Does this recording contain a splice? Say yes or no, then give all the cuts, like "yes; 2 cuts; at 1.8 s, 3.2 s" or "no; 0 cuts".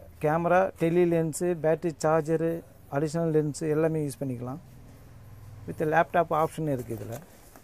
no; 0 cuts